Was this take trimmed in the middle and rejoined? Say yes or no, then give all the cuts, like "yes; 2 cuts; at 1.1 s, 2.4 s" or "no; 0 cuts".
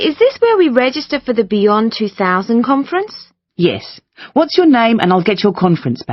no; 0 cuts